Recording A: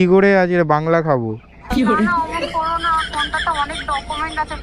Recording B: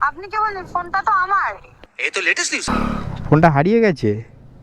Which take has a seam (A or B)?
B